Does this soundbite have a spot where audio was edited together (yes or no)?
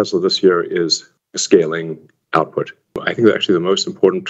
yes